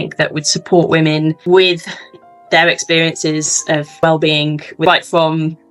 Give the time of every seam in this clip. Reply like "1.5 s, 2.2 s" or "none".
none